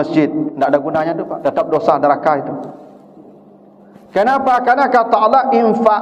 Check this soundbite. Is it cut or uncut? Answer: uncut